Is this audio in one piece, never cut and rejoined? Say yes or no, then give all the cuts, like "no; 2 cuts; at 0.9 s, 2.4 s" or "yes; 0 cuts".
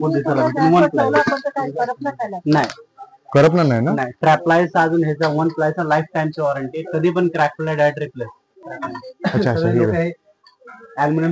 no; 1 cut; at 8.7 s